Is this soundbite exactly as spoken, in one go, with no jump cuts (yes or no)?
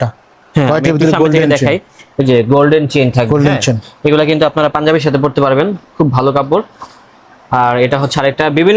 yes